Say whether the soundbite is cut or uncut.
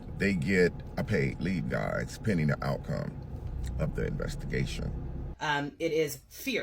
cut